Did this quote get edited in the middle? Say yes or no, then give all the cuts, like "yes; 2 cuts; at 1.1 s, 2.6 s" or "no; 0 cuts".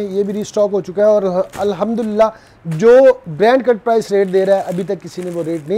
no; 0 cuts